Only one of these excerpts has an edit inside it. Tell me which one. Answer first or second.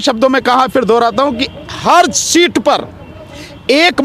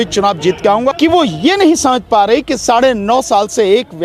second